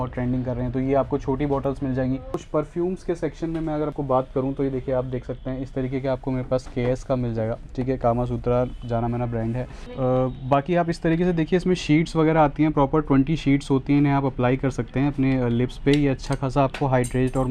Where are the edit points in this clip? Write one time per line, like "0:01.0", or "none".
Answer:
0:02.4
0:09.9